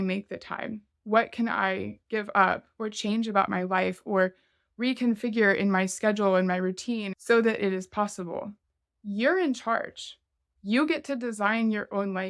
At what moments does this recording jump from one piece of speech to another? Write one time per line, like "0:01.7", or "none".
0:07.1